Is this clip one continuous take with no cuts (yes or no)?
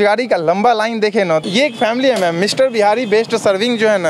no